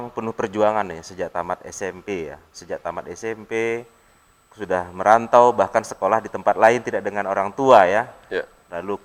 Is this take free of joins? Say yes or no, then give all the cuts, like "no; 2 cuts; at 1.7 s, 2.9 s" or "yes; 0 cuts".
yes; 0 cuts